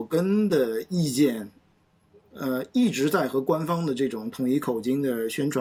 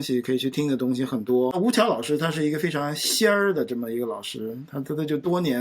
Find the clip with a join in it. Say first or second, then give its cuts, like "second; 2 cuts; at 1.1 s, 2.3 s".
second; 1 cut; at 1.5 s